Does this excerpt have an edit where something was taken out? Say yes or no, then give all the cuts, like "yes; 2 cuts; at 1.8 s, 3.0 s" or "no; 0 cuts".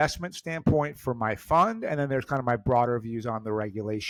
no; 0 cuts